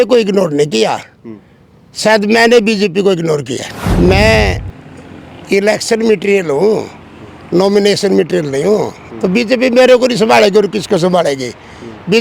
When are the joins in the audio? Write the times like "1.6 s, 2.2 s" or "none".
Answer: 3.8 s